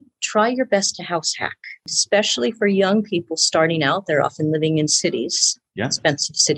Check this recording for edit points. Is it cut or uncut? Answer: cut